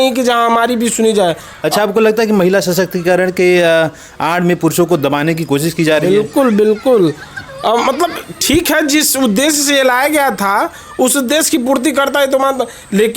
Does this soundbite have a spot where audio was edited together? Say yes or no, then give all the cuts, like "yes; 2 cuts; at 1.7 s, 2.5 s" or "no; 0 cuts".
no; 0 cuts